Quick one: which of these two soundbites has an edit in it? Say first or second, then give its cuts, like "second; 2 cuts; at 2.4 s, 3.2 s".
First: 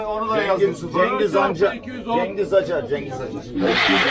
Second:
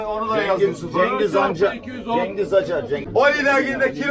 second; 1 cut; at 3.1 s